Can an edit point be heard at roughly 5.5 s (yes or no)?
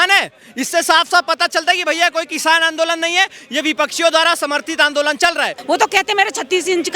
yes